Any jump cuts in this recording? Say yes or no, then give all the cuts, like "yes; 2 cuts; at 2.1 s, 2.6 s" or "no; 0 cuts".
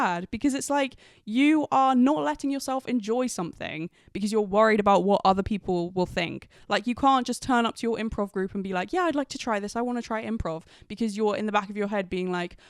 no; 0 cuts